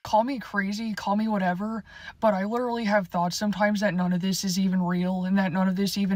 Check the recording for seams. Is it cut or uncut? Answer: uncut